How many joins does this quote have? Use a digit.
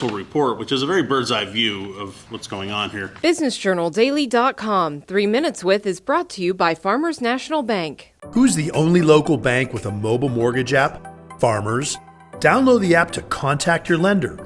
1